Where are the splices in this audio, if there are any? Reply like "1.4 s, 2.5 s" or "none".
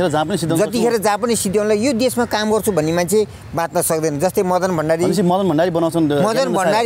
none